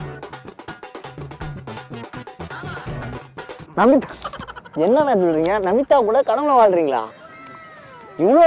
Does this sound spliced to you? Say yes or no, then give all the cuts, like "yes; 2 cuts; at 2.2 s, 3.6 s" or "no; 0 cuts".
no; 0 cuts